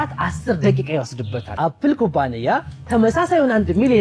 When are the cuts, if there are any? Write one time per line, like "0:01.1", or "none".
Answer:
0:01.5